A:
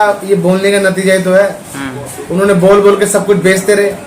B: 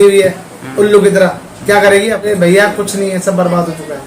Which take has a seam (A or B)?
B